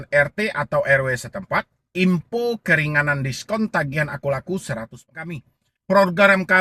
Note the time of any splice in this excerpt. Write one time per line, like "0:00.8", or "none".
0:05.2